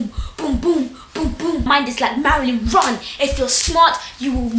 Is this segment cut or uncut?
cut